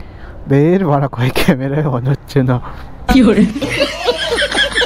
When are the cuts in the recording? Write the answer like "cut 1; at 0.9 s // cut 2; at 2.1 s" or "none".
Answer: none